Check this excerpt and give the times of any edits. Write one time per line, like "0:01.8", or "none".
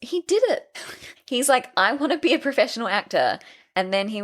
0:00.9